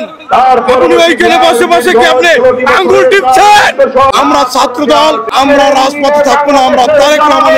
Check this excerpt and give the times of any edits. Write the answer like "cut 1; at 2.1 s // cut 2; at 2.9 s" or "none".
cut 1; at 4.1 s // cut 2; at 5.3 s

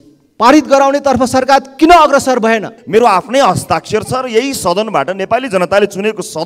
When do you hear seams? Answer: cut 1; at 2.8 s

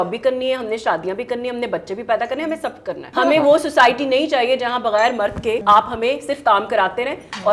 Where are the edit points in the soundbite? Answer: cut 1; at 3.1 s // cut 2; at 5.6 s

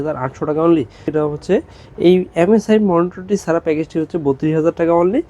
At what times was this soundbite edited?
cut 1; at 1.1 s

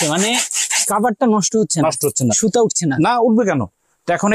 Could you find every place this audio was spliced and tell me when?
none

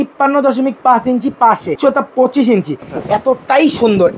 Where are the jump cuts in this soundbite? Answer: cut 1; at 1.8 s // cut 2; at 2.8 s

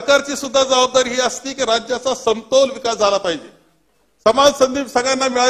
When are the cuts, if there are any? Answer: none

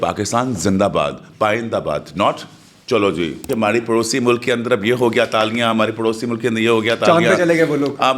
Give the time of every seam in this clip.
cut 1; at 3.5 s

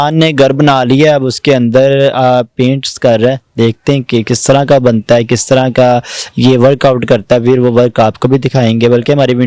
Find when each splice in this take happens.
none

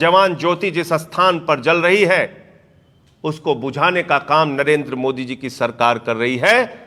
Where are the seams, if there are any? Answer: none

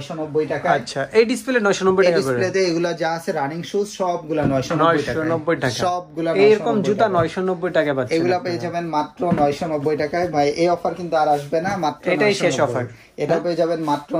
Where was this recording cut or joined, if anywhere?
none

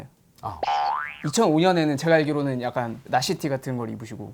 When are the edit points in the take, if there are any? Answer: cut 1; at 3.0 s

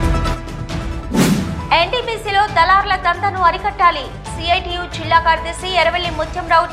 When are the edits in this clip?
cut 1; at 1.6 s

